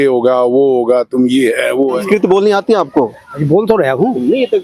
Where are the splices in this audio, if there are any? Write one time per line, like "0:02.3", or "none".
0:02.0